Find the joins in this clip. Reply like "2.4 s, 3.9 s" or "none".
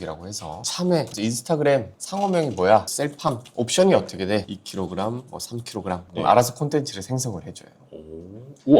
1.1 s